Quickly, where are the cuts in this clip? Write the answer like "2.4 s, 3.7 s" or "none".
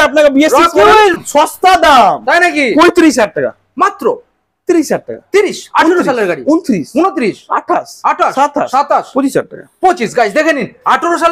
1.2 s